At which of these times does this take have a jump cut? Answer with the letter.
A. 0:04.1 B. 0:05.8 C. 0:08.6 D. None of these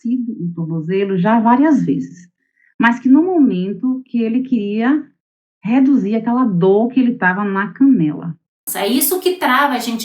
C